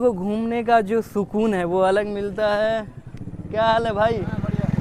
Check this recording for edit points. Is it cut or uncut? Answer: uncut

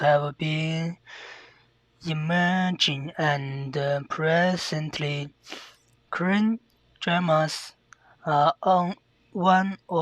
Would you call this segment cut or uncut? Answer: cut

